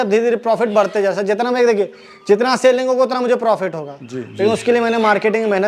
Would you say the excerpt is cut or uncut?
uncut